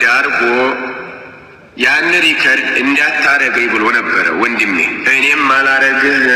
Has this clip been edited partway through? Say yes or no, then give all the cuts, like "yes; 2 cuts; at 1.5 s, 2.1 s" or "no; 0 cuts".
no; 0 cuts